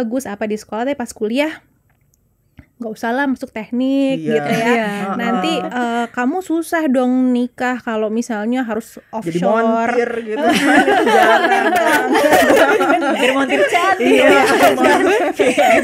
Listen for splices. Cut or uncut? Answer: uncut